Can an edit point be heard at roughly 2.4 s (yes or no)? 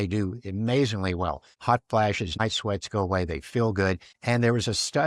yes